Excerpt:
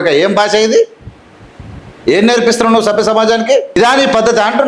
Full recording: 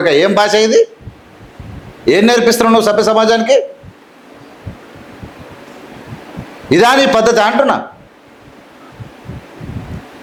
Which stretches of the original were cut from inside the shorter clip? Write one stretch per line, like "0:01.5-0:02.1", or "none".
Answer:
0:03.8-0:06.8